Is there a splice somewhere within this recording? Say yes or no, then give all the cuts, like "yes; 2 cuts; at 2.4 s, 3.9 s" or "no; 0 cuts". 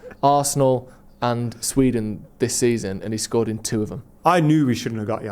yes; 1 cut; at 4.0 s